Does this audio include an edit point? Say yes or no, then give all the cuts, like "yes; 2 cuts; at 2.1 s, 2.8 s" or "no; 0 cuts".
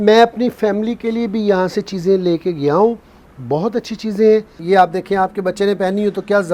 yes; 1 cut; at 4.5 s